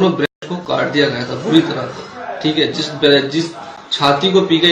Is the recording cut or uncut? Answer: uncut